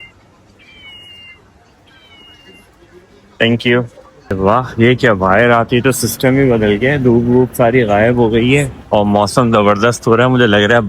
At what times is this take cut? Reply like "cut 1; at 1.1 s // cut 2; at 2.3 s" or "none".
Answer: cut 1; at 4.4 s